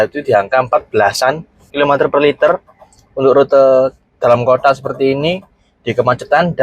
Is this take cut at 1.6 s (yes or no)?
yes